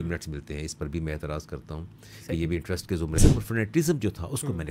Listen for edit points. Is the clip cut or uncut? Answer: cut